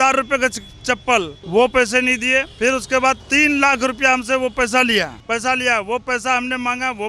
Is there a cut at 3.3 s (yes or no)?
no